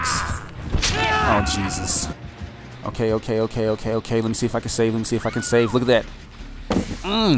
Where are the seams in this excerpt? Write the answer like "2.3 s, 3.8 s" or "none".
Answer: 2.1 s